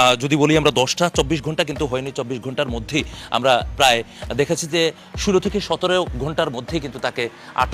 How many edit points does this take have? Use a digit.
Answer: 0